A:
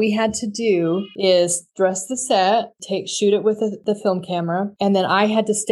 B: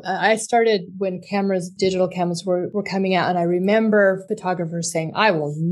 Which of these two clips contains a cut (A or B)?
B